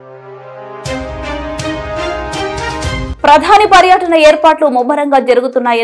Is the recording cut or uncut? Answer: cut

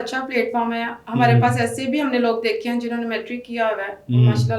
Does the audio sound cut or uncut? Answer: uncut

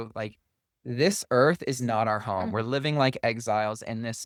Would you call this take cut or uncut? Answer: uncut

